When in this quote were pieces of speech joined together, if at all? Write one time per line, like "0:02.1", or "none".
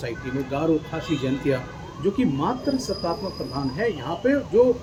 none

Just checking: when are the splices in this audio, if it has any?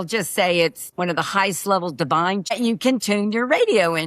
0:00.8
0:02.5

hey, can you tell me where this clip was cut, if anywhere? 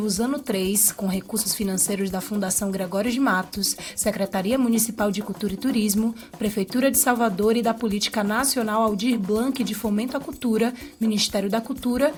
none

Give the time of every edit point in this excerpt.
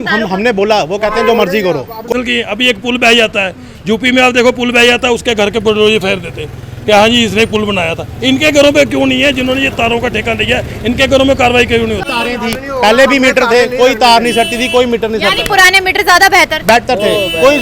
0:02.1
0:12.1

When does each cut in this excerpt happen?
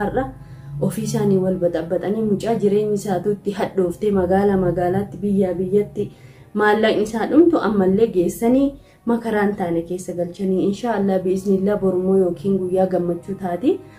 none

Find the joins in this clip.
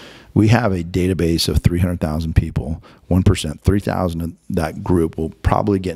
none

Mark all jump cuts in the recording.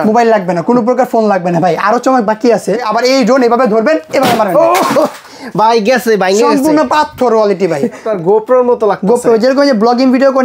0:02.8
0:08.0

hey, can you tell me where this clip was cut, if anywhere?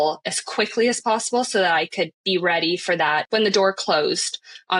0:03.2

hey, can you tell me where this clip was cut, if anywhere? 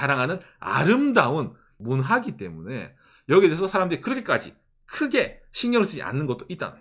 0:01.6

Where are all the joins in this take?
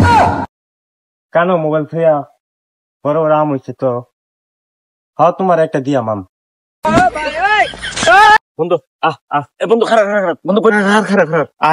0:08.4

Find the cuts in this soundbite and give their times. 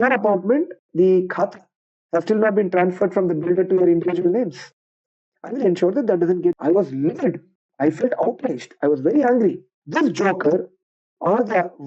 0:06.6

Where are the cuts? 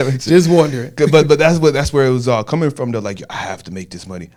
none

